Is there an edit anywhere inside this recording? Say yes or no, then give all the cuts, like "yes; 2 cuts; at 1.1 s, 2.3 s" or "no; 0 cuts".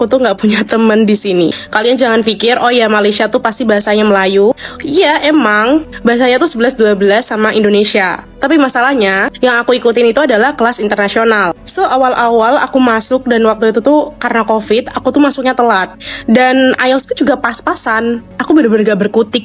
no; 0 cuts